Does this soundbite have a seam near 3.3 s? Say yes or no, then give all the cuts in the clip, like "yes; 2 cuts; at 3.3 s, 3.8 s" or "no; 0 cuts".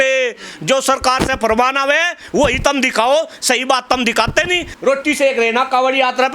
no; 1 cut; at 4.6 s